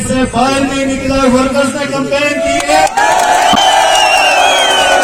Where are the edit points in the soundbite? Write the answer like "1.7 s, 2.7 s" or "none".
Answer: none